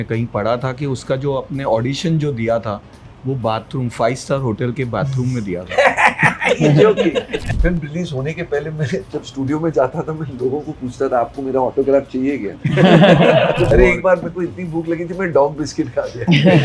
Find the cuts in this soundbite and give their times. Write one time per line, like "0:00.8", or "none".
0:07.4
0:13.7